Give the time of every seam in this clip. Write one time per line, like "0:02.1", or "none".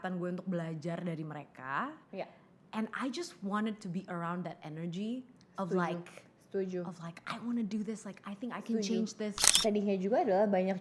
0:09.5